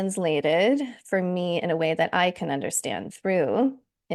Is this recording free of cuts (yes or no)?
no